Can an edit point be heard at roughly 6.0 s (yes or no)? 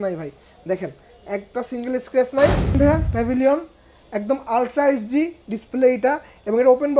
no